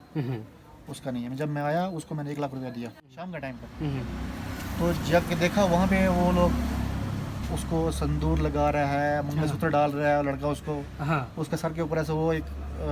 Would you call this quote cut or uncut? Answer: cut